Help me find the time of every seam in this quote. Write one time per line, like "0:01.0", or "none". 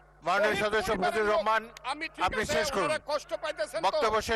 none